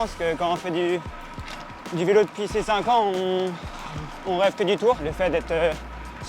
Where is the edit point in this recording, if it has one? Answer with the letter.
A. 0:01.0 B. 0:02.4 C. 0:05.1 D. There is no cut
C